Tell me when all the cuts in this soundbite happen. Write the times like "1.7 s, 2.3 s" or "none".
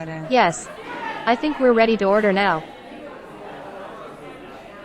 2.6 s